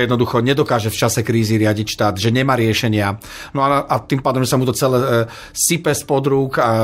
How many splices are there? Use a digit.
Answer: 0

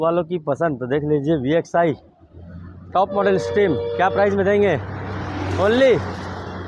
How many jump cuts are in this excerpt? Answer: 0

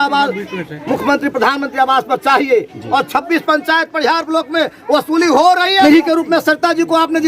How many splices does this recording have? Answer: 1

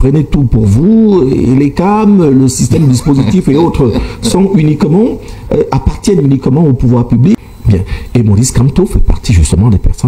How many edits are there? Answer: 1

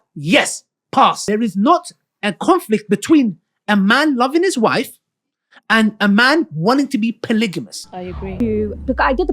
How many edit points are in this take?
2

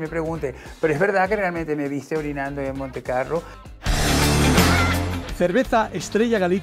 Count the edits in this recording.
1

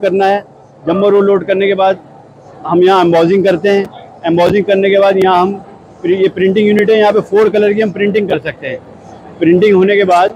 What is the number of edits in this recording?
0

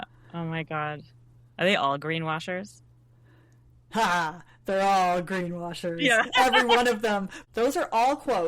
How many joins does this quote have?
1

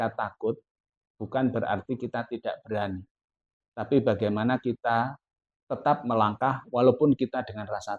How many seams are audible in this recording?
0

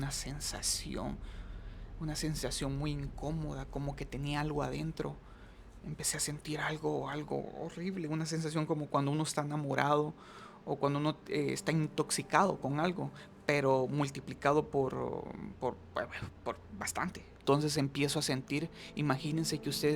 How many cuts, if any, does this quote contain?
1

